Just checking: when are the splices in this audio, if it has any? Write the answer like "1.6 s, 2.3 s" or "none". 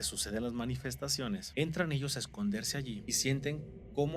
1.5 s, 3.1 s